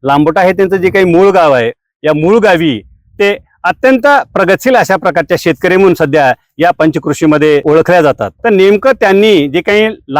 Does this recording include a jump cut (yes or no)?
yes